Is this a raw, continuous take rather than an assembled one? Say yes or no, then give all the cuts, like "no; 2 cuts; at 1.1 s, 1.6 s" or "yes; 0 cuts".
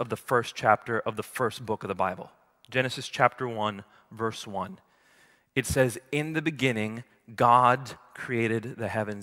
yes; 0 cuts